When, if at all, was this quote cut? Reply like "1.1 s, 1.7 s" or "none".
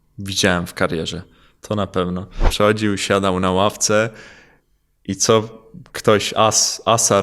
2.5 s